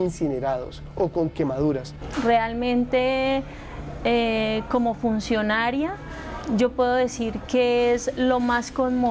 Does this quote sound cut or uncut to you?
cut